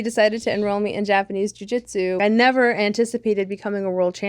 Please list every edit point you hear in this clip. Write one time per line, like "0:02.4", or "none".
0:02.2